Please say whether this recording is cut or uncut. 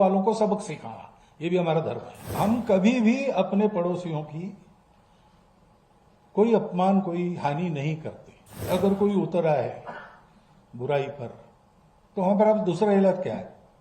cut